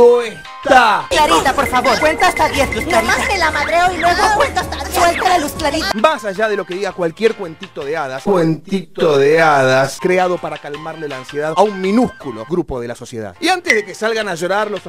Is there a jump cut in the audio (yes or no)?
no